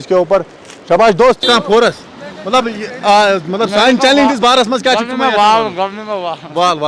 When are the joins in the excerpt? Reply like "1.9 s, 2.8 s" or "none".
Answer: 1.4 s